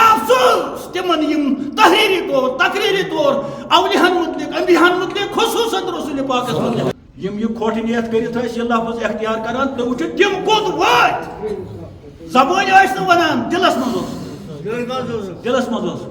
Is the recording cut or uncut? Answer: cut